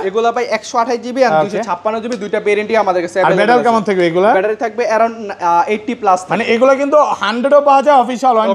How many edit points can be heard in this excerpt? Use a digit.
0